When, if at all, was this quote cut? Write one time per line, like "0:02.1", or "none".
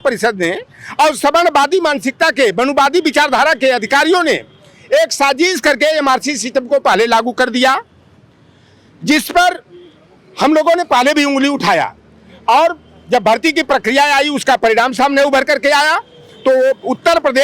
none